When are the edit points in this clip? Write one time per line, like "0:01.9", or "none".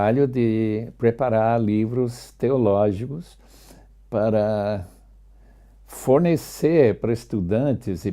0:03.9